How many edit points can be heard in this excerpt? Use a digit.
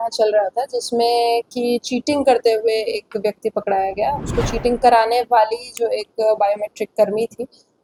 0